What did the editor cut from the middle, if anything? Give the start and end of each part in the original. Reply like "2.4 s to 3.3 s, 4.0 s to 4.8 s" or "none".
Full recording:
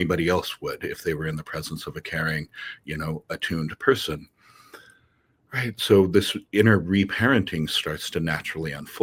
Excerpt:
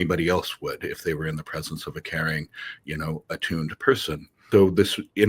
4.4 s to 5.8 s